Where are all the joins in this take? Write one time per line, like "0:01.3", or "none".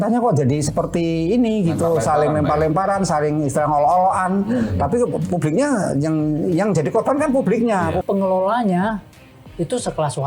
0:08.0